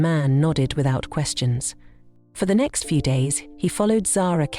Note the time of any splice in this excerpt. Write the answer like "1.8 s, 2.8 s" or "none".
2.1 s